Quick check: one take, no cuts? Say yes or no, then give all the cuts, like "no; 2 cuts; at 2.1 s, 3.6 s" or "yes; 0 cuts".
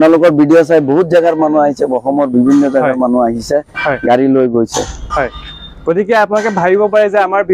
yes; 0 cuts